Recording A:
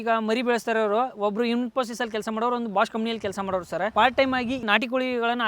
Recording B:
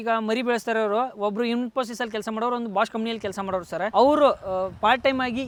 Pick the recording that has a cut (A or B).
A